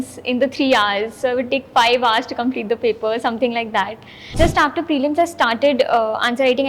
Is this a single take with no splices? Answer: no; 1 cut; at 4.3 s

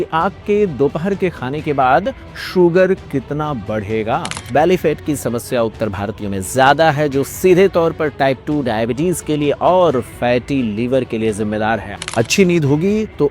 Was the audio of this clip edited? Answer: yes; 2 cuts; at 4.4 s, 12.0 s

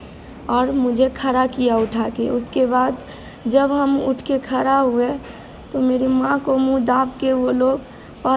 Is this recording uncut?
yes; 0 cuts

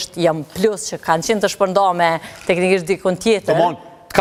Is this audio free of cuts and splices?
yes; 0 cuts

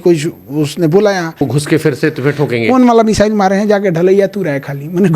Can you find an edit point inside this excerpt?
yes; 1 cut; at 1.4 s

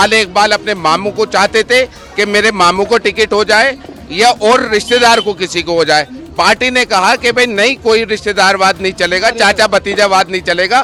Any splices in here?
no; 0 cuts

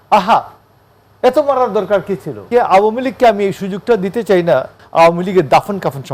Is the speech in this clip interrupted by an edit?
yes; 2 cuts; at 2.4 s, 4.8 s

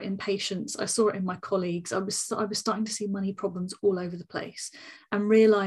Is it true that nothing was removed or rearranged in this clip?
yes; 0 cuts

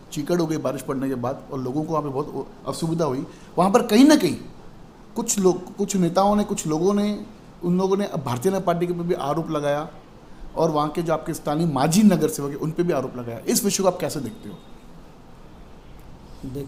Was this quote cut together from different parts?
no; 0 cuts

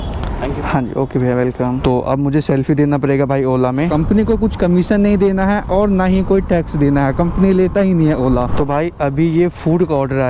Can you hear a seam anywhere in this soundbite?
yes; 3 cuts; at 1.8 s, 3.9 s, 8.5 s

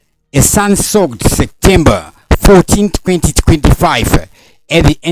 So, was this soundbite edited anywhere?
no; 0 cuts

